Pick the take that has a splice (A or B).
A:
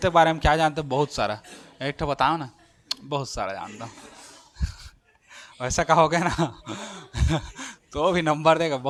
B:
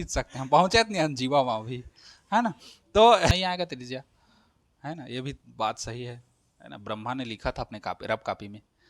B